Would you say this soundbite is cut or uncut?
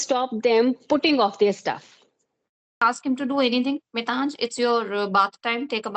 cut